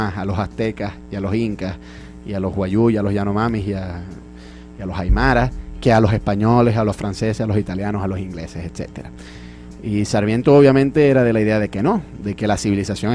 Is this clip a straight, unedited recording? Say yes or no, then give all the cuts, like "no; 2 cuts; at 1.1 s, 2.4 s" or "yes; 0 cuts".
yes; 0 cuts